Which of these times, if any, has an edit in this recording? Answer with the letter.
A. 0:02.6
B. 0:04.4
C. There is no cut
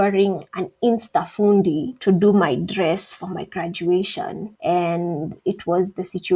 C